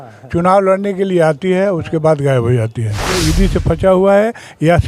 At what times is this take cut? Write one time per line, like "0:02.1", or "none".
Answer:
0:03.2

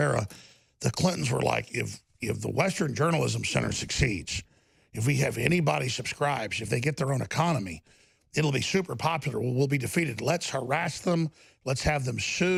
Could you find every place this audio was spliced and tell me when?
none

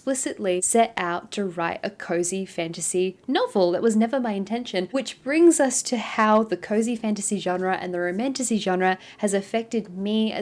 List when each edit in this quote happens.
none

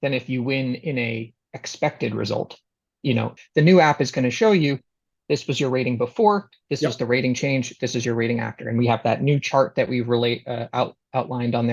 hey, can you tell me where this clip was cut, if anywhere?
0:03.4

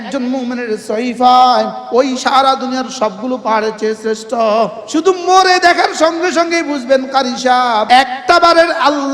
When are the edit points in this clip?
0:01.8
0:04.8
0:07.8

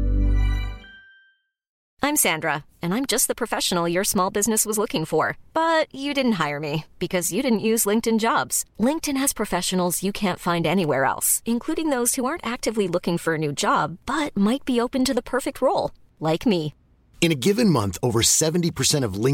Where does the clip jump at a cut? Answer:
0:01.8

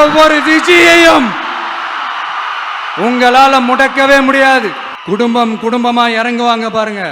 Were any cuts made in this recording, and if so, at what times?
0:04.9

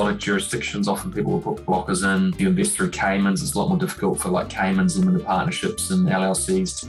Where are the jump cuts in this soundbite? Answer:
0:02.4

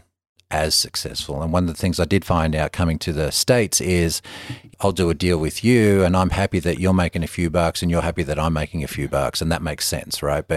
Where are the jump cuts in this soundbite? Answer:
0:04.7

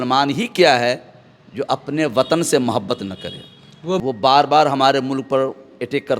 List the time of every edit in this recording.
0:04.0

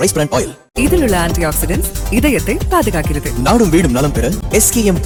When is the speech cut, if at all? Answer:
none

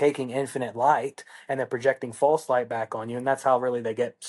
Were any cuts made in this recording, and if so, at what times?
none

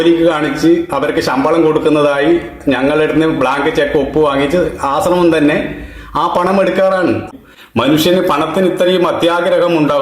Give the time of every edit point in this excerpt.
0:07.2

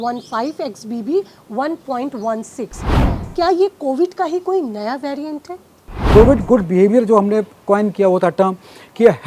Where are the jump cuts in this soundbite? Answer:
0:03.1
0:06.0

